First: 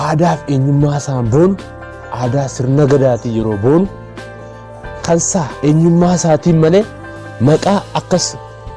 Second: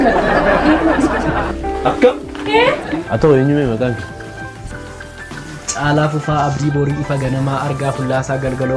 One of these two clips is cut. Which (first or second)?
second